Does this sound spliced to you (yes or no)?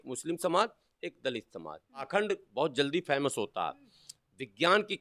yes